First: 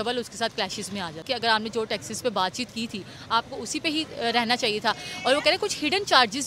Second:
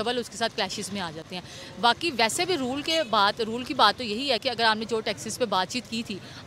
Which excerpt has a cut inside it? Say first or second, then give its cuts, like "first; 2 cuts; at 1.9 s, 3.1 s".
first; 1 cut; at 1.3 s